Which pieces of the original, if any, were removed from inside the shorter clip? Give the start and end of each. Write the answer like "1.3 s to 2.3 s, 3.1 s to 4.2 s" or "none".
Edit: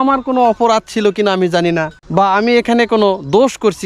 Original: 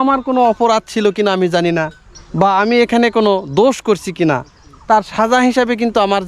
2.0 s to 2.2 s